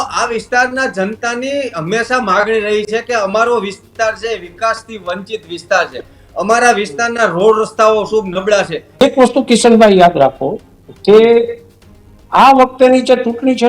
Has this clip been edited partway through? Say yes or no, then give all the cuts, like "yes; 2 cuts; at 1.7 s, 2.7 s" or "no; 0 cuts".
yes; 1 cut; at 9.0 s